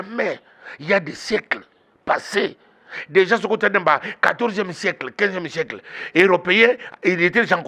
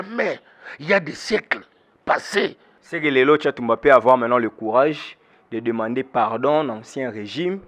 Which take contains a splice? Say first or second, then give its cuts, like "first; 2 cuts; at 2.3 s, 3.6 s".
second; 1 cut; at 2.7 s